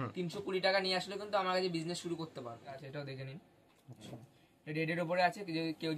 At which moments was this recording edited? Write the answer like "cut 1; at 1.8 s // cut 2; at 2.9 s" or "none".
cut 1; at 2.8 s